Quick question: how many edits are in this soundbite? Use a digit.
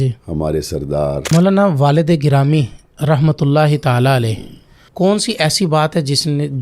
1